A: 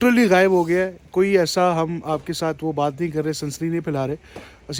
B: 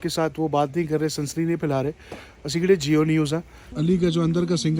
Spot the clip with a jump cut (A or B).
B